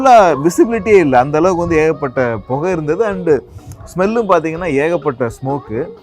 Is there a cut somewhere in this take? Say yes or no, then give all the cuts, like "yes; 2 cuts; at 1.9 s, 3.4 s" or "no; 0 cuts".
no; 0 cuts